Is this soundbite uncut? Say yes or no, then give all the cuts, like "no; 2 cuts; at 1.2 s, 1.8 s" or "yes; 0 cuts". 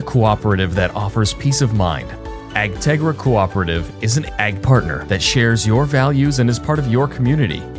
yes; 0 cuts